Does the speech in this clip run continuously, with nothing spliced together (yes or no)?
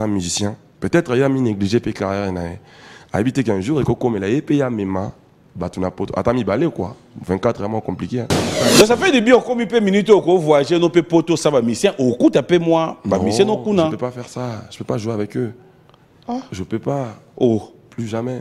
no